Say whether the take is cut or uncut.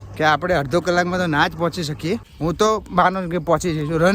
cut